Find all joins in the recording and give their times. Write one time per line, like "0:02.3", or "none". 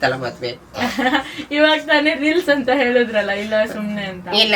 none